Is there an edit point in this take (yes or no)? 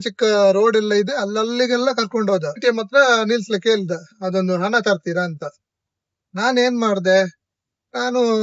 yes